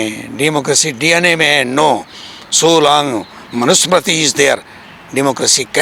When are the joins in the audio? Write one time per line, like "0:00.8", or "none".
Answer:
none